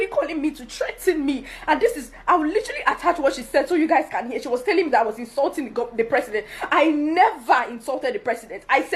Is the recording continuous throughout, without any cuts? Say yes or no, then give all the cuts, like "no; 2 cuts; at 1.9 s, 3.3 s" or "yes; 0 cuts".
yes; 0 cuts